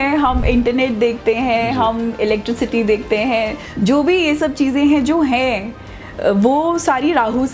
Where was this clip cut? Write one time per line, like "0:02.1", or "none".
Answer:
none